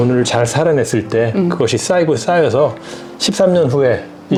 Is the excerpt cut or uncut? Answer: uncut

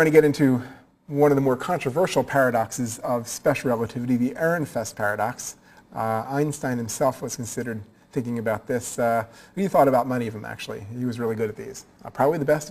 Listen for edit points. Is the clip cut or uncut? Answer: cut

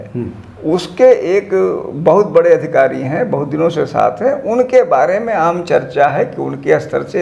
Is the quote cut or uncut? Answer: uncut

